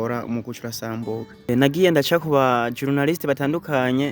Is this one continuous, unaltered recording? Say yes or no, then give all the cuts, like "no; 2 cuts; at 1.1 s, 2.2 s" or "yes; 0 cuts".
no; 1 cut; at 1.5 s